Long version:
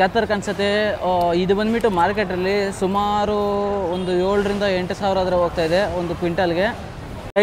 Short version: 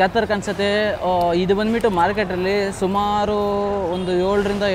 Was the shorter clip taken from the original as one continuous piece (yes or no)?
yes